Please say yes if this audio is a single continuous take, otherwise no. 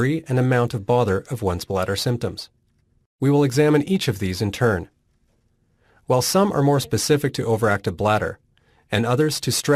yes